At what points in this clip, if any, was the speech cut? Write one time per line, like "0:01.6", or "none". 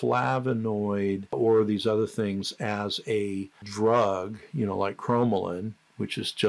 0:01.3
0:03.6